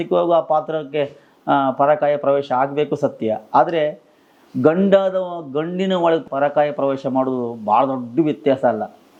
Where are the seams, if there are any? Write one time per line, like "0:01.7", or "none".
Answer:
none